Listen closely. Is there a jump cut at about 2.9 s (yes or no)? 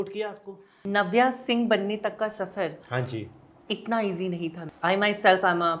no